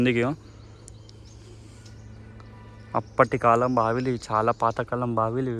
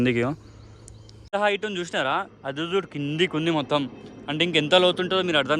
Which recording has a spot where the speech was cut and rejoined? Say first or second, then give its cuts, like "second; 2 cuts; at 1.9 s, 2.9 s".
second; 1 cut; at 1.3 s